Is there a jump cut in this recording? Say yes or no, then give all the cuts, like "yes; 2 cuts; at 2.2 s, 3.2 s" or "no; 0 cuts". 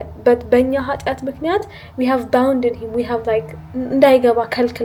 no; 0 cuts